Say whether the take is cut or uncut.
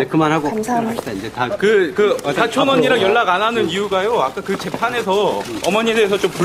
cut